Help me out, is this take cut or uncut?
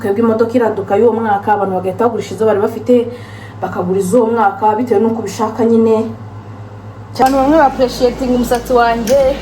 cut